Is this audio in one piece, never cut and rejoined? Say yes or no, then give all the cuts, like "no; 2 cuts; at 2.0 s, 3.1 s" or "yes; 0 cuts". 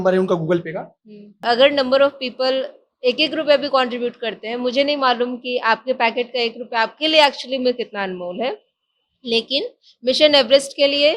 no; 1 cut; at 1.4 s